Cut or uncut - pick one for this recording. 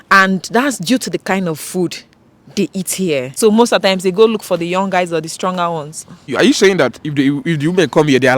cut